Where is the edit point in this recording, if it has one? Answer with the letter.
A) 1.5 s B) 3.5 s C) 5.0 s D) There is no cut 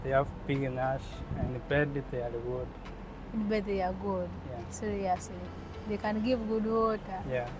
A